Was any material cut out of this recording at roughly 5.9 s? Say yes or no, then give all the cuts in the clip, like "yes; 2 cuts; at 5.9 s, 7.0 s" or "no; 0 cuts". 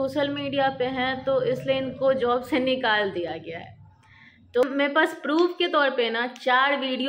no; 1 cut; at 4.6 s